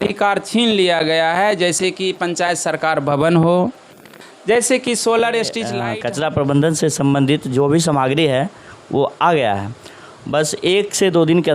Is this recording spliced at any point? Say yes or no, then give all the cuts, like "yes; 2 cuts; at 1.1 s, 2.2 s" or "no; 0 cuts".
yes; 1 cut; at 5.7 s